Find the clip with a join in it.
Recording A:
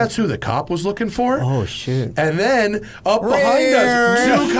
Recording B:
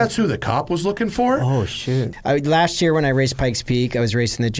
B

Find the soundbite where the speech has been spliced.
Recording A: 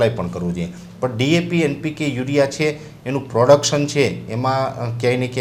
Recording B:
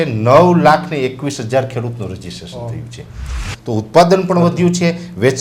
B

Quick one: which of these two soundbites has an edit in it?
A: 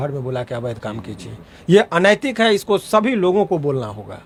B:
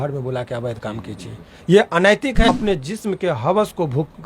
B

